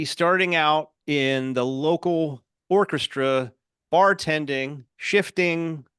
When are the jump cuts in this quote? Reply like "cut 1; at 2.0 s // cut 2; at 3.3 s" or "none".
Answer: cut 1; at 1.0 s // cut 2; at 4.9 s